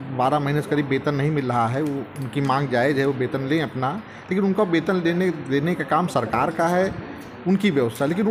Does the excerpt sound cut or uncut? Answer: uncut